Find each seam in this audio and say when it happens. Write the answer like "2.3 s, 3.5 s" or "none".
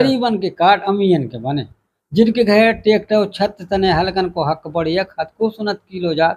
none